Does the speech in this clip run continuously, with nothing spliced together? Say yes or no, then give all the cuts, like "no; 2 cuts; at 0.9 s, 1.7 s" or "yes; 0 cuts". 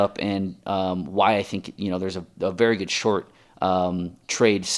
yes; 0 cuts